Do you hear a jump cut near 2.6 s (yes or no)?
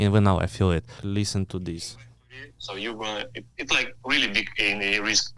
no